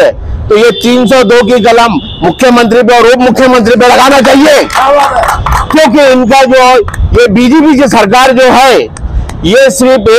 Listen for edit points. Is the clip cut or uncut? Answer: uncut